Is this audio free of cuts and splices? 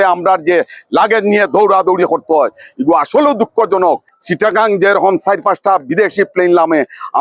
no; 1 cut; at 4.1 s

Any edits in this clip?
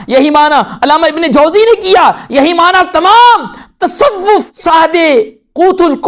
yes; 1 cut; at 4.5 s

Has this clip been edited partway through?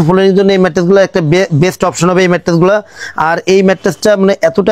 no; 0 cuts

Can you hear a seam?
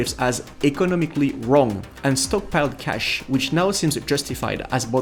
no; 0 cuts

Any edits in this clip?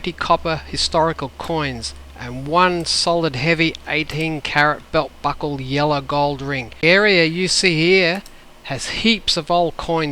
yes; 1 cut; at 6.8 s

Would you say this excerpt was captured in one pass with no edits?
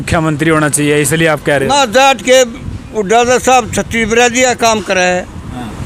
yes; 0 cuts

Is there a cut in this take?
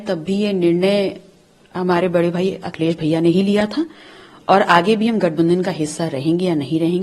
no; 0 cuts

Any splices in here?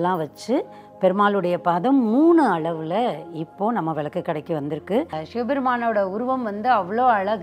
yes; 1 cut; at 5.2 s

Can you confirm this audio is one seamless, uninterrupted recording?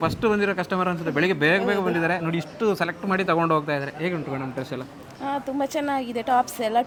yes; 0 cuts

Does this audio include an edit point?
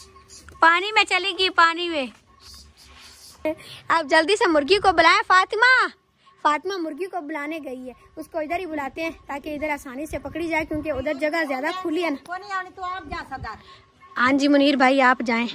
yes; 1 cut; at 3.5 s

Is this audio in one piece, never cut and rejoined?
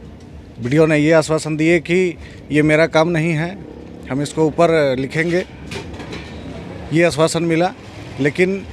yes; 0 cuts

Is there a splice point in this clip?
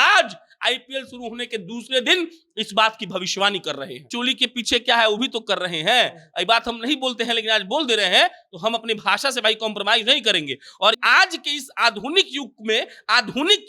yes; 2 cuts; at 4.0 s, 11.0 s

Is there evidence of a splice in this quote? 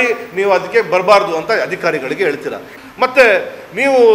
yes; 1 cut; at 2.6 s

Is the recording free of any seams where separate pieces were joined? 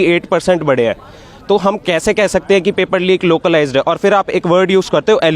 yes; 0 cuts

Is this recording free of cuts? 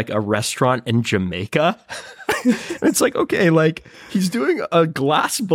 yes; 0 cuts

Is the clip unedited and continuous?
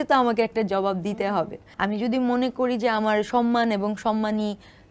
no; 1 cut; at 1.6 s

